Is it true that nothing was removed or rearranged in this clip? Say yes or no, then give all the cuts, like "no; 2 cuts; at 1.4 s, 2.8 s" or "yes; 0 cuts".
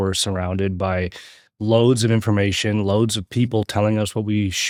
yes; 0 cuts